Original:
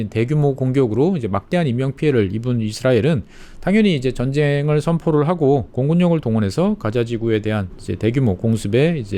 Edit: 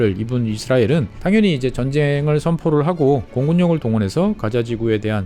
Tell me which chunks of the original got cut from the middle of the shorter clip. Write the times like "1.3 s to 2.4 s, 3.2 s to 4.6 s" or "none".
3.3 s to 3.5 s